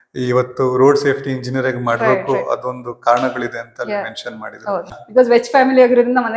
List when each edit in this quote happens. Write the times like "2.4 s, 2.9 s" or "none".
5.0 s

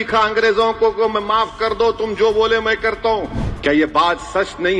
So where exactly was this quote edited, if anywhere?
3.4 s

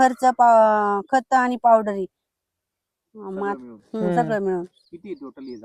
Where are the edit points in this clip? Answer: none

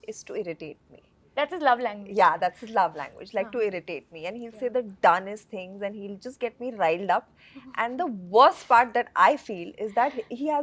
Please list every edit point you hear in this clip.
none

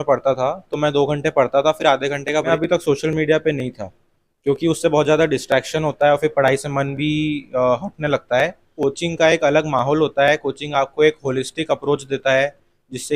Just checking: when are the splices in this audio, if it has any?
2.5 s, 8.7 s

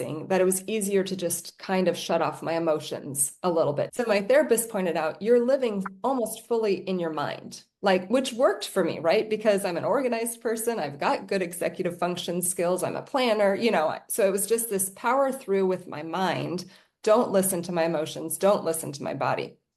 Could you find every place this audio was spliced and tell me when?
3.9 s

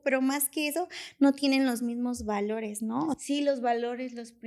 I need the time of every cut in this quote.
3.2 s

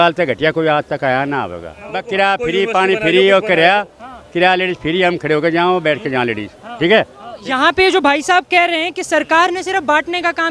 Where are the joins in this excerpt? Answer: 2.0 s, 7.2 s

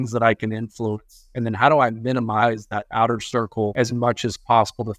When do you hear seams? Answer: 3.7 s

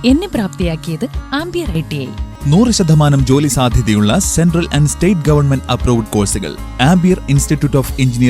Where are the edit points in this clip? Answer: 2.3 s

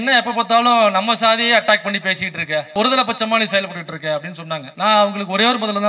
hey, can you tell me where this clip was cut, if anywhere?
4.7 s

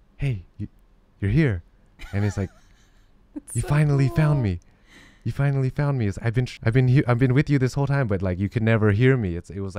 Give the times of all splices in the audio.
6.5 s

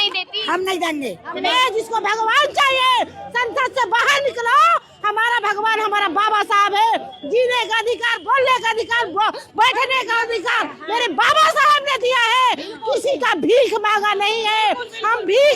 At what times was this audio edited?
1.5 s

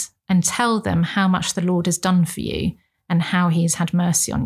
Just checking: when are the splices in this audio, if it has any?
none

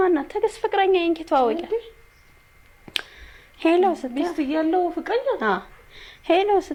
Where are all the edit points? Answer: none

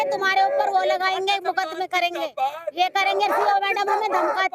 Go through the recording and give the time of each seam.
none

